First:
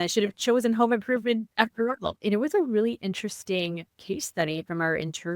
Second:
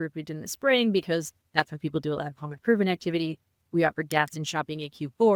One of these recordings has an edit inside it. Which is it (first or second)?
first